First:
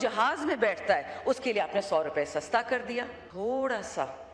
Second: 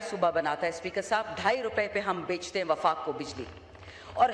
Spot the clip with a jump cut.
first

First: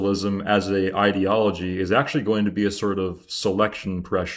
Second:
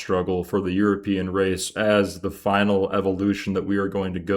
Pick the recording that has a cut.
second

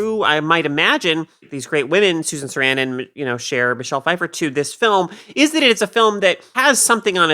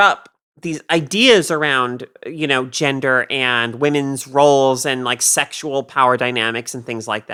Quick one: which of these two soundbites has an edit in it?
first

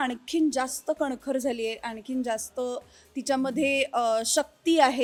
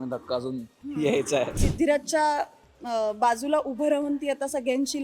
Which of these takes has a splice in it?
second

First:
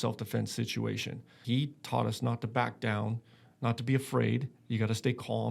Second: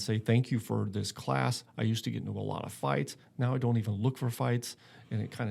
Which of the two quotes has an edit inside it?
first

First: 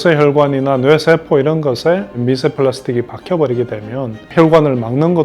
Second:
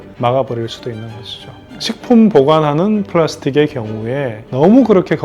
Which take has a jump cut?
second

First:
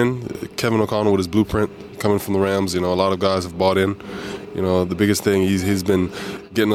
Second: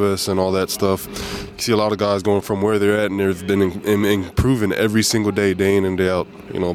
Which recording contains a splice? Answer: second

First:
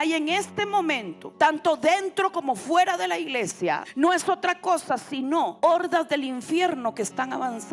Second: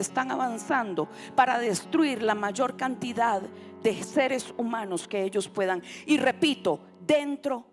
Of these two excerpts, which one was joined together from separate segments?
first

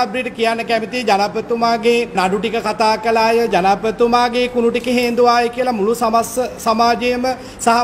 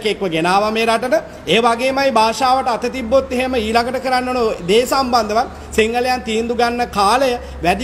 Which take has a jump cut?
first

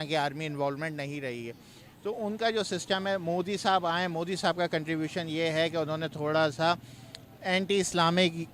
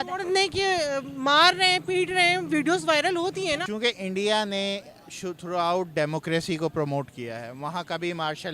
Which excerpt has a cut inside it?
second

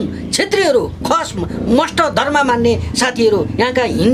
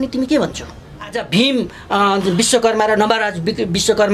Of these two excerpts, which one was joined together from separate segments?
second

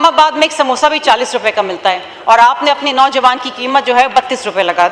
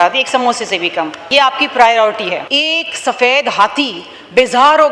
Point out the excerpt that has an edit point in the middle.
second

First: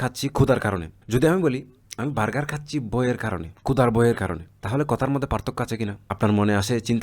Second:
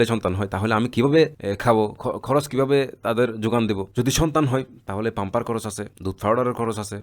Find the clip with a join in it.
first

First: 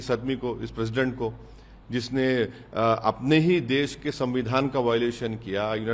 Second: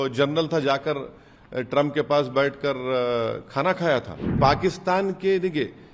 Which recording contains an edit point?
second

